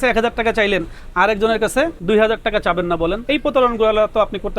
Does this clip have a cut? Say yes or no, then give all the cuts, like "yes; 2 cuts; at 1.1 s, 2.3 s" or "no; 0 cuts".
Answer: yes; 2 cuts; at 2.0 s, 3.2 s